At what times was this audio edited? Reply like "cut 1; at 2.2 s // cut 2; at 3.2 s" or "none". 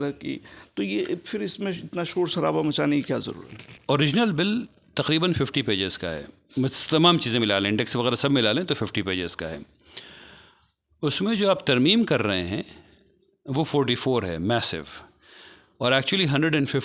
cut 1; at 3.7 s